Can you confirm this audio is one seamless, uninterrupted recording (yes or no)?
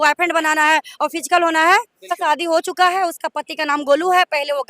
no